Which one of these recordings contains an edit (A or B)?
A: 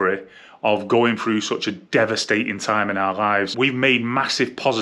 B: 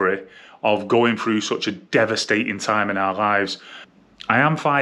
A